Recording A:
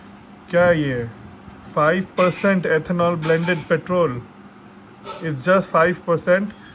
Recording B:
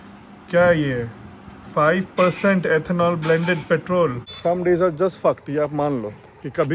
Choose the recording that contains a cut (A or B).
B